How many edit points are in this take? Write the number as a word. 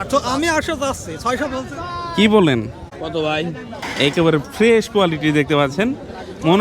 one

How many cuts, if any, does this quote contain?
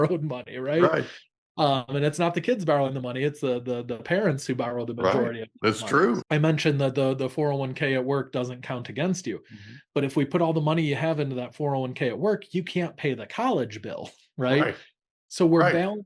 one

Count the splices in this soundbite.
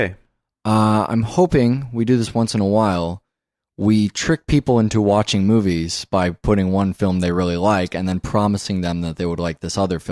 zero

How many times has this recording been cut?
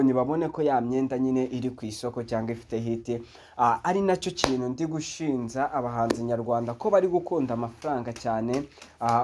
zero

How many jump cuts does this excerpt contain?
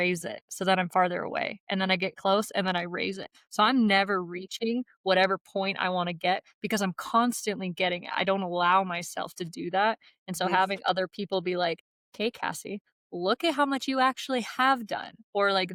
zero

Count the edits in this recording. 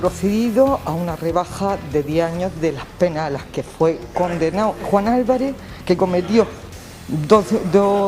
one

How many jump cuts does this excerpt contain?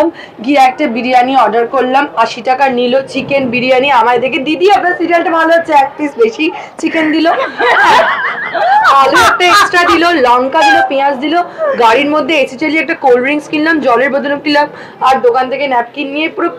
zero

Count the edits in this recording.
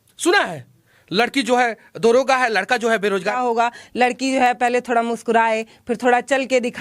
one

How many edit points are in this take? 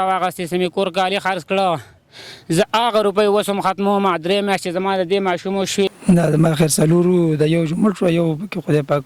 one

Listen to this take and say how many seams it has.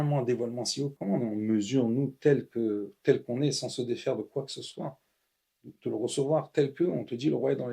one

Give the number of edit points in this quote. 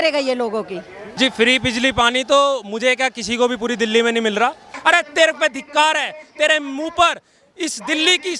two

